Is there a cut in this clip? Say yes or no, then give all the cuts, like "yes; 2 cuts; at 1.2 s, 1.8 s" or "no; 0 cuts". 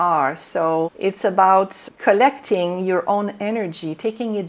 yes; 2 cuts; at 0.9 s, 1.8 s